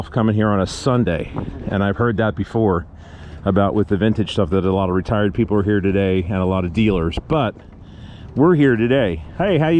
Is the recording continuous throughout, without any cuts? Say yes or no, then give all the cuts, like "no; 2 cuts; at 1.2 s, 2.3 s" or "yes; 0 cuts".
yes; 0 cuts